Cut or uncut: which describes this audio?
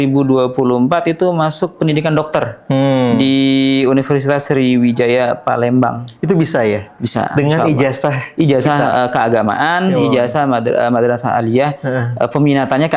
uncut